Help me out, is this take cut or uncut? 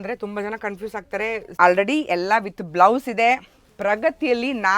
cut